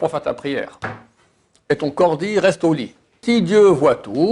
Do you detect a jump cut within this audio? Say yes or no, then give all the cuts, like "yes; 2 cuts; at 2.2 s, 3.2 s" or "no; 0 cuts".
yes; 1 cut; at 3.2 s